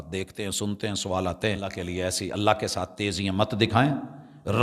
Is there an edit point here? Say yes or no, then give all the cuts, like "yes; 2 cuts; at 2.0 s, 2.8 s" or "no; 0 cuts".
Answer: yes; 1 cut; at 1.8 s